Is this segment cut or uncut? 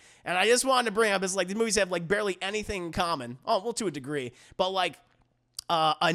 uncut